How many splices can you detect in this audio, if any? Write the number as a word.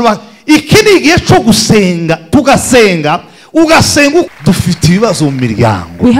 one